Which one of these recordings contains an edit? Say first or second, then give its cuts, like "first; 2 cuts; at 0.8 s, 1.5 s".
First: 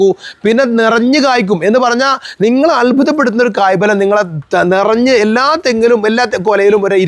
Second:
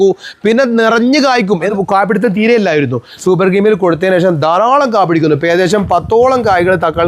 second; 1 cut; at 1.7 s